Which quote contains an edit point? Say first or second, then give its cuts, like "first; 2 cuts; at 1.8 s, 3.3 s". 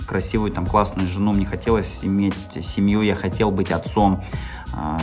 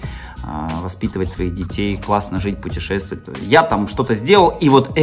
second; 1 cut; at 3.2 s